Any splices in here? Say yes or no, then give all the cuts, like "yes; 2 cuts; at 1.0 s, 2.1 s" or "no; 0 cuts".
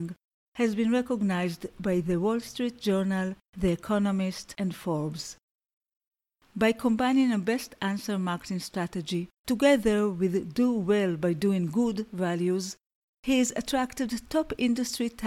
yes; 2 cuts; at 4.5 s, 9.3 s